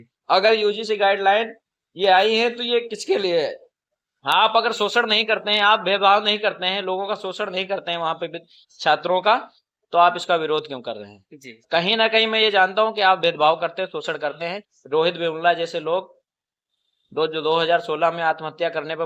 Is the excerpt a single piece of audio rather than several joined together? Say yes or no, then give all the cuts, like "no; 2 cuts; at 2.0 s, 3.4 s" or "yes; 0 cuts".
yes; 0 cuts